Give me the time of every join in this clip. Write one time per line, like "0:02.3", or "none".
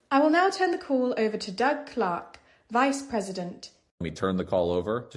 0:03.8